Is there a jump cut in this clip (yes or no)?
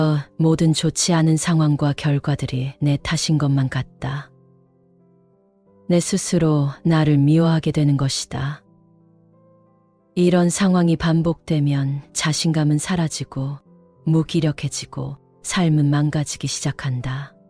yes